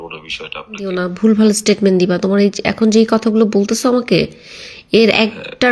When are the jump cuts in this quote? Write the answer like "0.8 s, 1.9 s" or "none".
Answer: 1.0 s